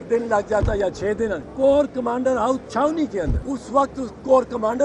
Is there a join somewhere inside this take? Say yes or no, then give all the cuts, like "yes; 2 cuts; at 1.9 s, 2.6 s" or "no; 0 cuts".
yes; 2 cuts; at 1.4 s, 3.4 s